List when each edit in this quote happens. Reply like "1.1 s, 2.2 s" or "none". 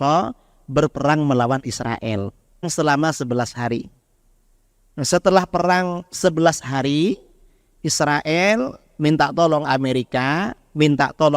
2.7 s